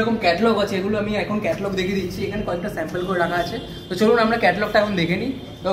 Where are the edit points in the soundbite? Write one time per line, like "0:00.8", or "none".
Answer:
none